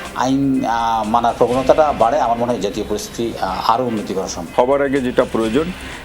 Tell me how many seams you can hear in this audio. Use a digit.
1